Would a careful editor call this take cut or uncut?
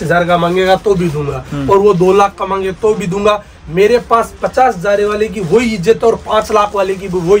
uncut